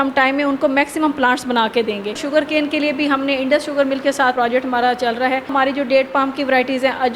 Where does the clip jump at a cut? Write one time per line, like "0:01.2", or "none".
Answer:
0:02.2
0:04.3
0:05.5

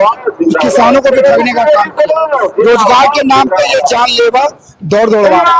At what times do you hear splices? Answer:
none

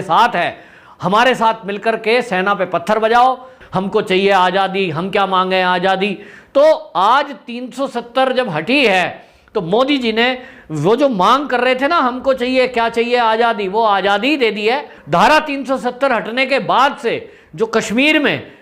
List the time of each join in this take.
0:03.5
0:14.9

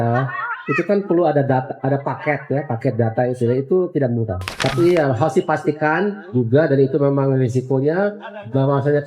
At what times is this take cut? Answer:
0:04.4

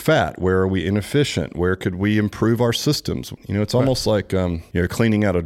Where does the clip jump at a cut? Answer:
0:03.4
0:04.6

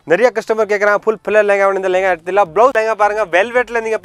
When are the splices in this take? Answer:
0:02.7

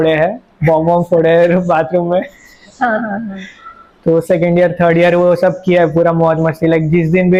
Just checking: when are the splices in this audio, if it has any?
none

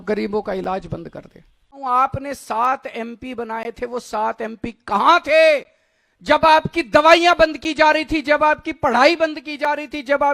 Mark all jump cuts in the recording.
0:01.8

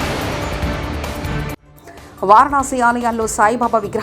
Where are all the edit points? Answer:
0:01.6

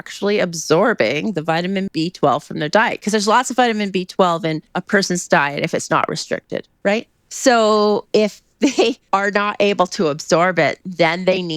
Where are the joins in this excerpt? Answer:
0:01.9
0:04.7
0:07.2
0:09.0

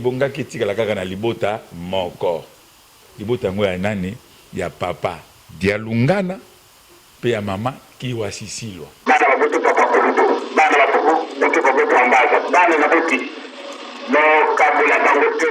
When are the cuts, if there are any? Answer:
0:08.9

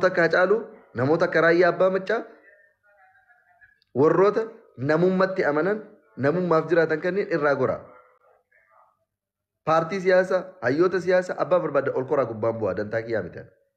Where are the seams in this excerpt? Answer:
none

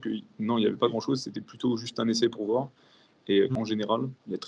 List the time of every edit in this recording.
0:03.5

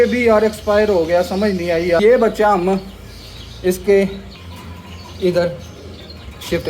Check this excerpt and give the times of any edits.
0:02.0

